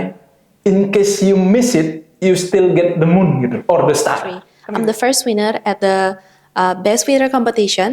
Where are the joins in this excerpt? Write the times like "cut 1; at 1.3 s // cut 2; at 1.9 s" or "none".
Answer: cut 1; at 4.5 s